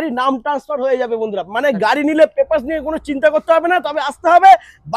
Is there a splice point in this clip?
no; 0 cuts

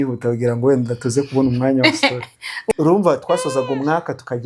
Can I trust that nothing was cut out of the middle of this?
no; 1 cut; at 2.7 s

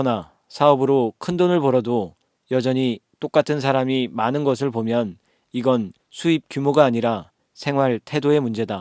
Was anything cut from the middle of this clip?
yes; 1 cut; at 6.0 s

